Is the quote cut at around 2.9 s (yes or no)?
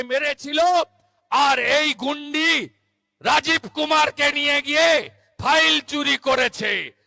no